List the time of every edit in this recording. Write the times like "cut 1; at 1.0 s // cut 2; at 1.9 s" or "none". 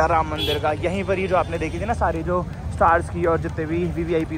none